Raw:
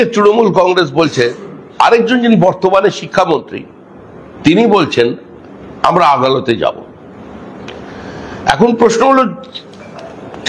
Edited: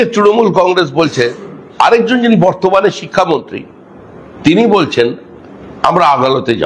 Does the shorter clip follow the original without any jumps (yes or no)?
yes